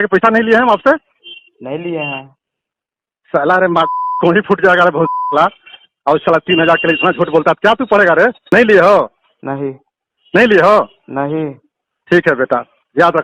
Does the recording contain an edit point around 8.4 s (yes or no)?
yes